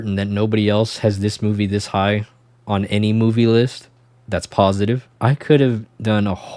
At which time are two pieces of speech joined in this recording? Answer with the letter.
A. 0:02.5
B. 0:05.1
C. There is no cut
B